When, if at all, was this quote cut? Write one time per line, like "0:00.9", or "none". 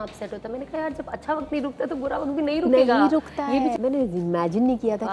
0:03.7